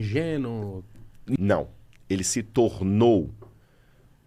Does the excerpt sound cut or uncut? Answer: cut